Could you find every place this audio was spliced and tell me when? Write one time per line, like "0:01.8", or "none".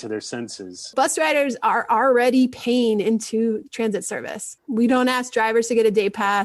0:00.9
0:04.6